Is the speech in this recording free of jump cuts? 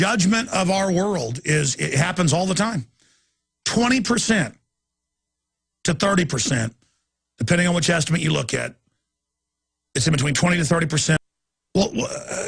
yes; 0 cuts

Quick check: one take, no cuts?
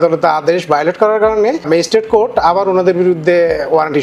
no; 1 cut; at 1.6 s

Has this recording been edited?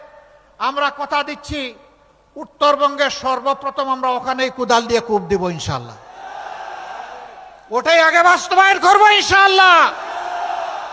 no; 0 cuts

